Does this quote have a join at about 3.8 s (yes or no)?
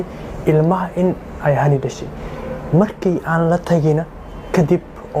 no